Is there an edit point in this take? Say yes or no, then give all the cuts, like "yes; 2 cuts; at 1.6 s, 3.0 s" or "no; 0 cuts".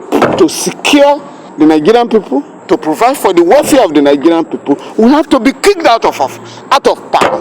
yes; 3 cuts; at 1.4 s, 2.5 s, 6.5 s